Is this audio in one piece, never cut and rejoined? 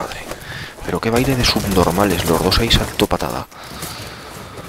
no; 1 cut; at 3.6 s

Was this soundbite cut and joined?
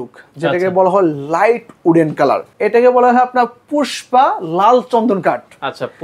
yes; 1 cut; at 2.5 s

